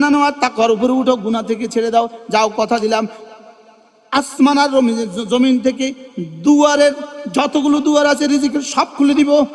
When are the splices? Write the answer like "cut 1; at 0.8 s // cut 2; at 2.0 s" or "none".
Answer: none